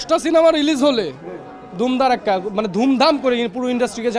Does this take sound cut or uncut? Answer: uncut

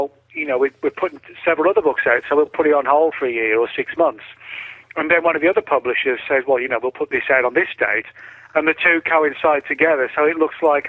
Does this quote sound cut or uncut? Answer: cut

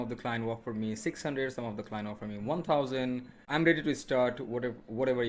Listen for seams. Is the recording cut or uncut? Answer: cut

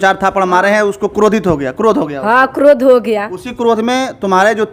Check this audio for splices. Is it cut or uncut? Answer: uncut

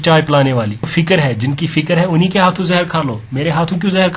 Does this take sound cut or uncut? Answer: cut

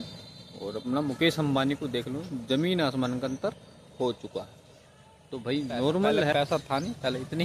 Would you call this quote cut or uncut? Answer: cut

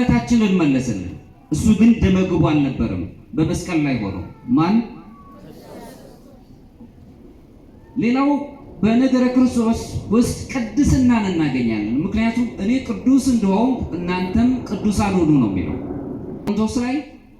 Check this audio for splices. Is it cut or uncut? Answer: cut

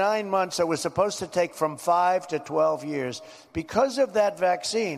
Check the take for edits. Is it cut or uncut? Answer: uncut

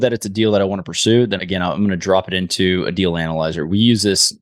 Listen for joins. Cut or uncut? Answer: uncut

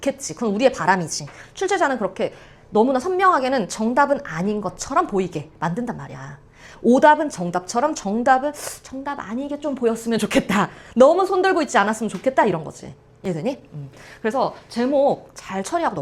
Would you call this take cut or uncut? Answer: uncut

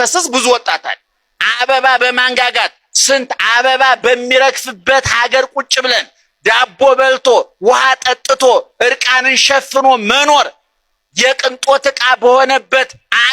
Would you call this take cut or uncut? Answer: cut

